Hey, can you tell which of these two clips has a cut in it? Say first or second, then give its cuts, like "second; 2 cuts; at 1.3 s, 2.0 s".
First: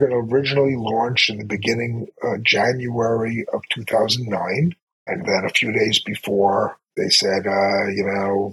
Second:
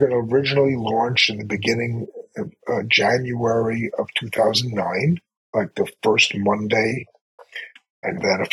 first; 2 cuts; at 2.1 s, 4.9 s